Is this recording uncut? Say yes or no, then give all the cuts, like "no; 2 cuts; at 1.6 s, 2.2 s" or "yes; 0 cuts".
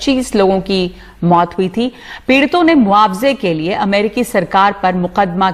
yes; 0 cuts